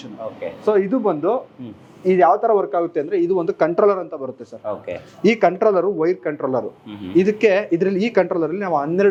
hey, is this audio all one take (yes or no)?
yes